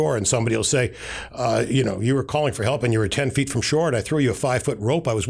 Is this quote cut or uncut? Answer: uncut